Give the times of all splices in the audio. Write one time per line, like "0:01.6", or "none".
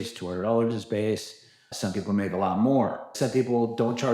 0:01.7
0:03.1